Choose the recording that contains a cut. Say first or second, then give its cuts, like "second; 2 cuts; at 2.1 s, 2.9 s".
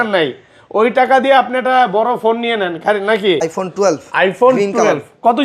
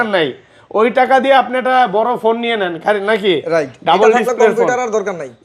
first; 1 cut; at 3.4 s